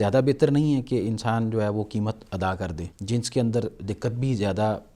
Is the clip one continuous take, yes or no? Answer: no